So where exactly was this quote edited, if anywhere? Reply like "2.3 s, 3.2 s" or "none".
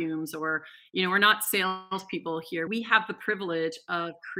2.7 s